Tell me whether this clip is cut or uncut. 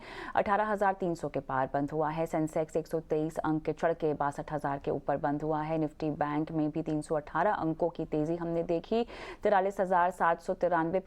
cut